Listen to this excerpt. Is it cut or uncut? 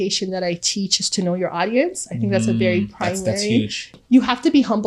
cut